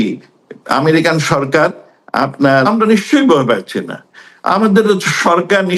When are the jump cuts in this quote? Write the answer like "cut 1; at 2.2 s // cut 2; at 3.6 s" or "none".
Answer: cut 1; at 2.7 s